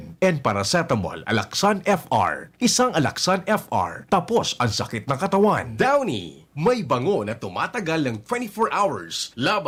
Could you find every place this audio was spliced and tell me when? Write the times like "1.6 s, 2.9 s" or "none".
none